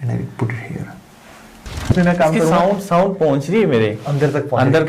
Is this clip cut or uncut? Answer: cut